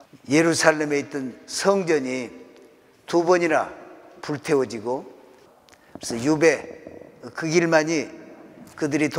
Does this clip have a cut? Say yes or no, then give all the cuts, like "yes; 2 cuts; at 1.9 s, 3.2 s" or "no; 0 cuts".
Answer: yes; 1 cut; at 5.9 s